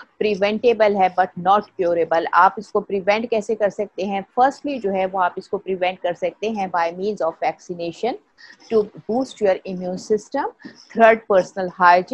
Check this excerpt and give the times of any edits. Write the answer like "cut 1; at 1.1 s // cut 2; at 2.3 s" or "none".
none